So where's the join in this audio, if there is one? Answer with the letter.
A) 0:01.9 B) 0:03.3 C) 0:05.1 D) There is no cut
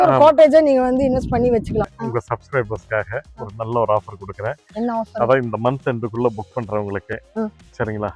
A